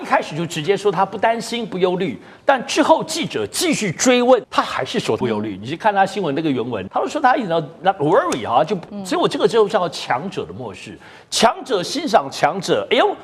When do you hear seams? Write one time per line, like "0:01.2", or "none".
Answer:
0:04.7
0:06.8
0:08.8

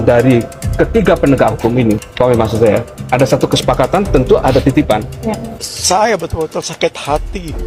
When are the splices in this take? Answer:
0:05.5

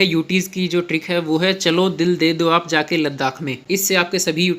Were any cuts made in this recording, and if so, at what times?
0:03.6

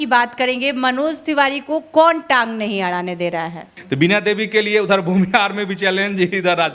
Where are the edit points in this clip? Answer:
0:03.7

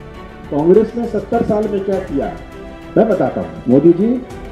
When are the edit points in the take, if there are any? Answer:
0:03.5

